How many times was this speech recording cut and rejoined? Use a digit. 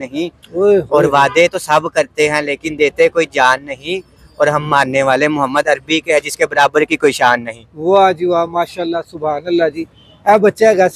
0